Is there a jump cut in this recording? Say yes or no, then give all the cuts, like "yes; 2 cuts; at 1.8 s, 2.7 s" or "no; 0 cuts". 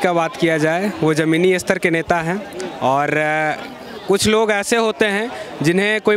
no; 0 cuts